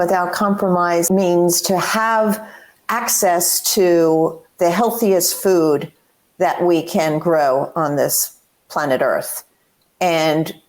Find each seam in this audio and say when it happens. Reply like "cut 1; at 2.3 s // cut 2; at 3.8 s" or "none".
cut 1; at 1.1 s